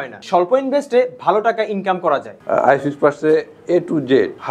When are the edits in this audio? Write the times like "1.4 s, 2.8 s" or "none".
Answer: 2.4 s